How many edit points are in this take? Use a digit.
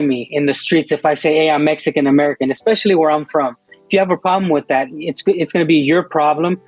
0